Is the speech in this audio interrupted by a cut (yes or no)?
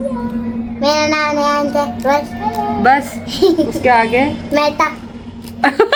no